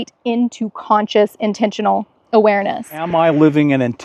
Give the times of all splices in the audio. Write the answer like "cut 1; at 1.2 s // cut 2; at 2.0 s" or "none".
cut 1; at 3.0 s